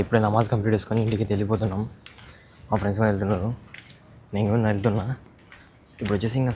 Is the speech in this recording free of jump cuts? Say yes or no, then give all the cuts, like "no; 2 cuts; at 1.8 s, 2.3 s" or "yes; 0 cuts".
yes; 0 cuts